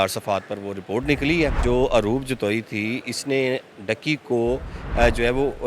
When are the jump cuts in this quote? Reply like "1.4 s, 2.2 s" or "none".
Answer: 1.6 s